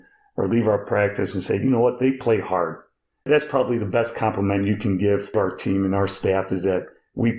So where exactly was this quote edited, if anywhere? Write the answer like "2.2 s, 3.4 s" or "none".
3.3 s, 5.3 s